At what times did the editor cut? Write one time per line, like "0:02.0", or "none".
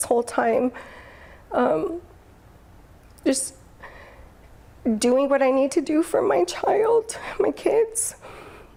none